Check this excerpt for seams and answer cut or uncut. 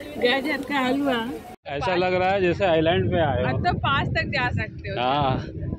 cut